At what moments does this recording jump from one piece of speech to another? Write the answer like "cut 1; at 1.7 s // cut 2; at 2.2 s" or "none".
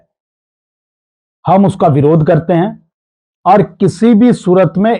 none